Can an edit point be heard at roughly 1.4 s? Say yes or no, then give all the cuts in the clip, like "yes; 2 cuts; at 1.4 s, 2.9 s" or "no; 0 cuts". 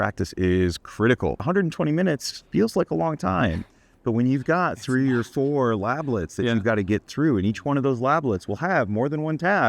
yes; 1 cut; at 1.4 s